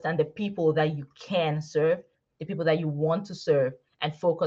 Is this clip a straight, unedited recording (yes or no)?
yes